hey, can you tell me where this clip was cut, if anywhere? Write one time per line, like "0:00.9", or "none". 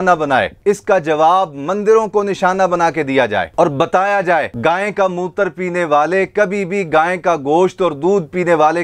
none